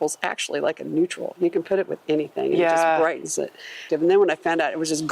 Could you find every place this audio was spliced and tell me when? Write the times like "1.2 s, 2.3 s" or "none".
3.9 s

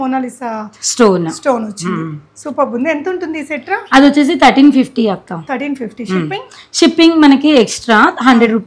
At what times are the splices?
none

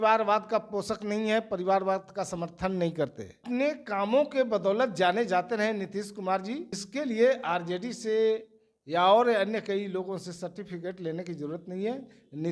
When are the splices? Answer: 3.3 s, 6.8 s

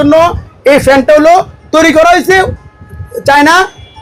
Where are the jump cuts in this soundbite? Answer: none

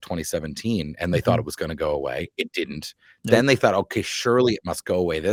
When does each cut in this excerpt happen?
none

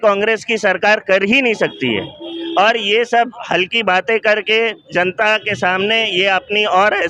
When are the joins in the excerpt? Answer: none

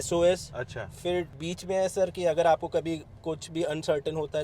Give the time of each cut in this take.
1.4 s

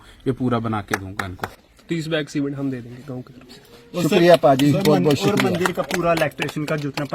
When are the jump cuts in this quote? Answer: 1.6 s

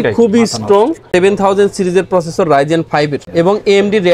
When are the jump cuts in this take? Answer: 1.0 s, 3.2 s

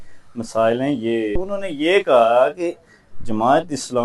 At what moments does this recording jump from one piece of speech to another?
1.6 s

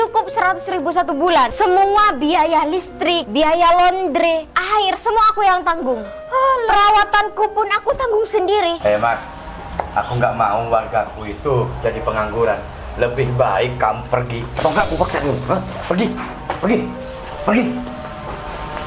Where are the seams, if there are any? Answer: 1.5 s, 3.3 s, 4.5 s, 8.8 s

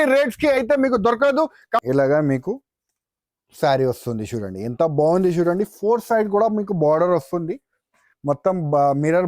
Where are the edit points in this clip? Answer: 1.8 s

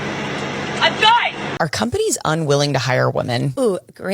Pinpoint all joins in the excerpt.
1.5 s

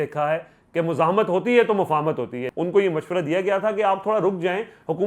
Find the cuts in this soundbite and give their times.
2.4 s

